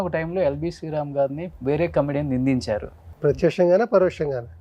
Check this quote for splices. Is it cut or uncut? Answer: cut